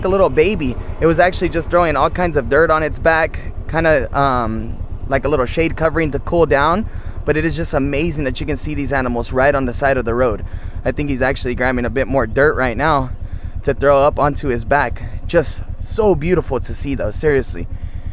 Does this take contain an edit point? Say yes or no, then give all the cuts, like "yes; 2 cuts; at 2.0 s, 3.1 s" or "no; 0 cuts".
no; 0 cuts